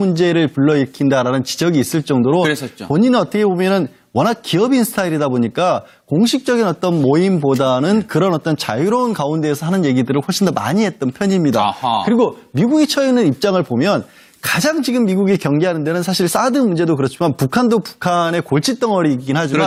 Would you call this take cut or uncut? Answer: uncut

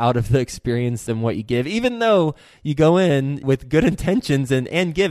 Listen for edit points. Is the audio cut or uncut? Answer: cut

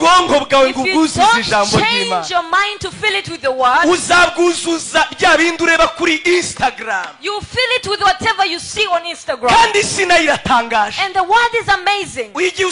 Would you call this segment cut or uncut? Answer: uncut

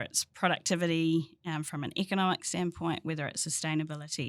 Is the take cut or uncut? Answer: uncut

